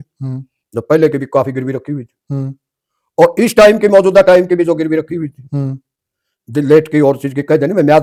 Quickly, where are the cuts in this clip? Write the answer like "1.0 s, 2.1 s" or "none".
none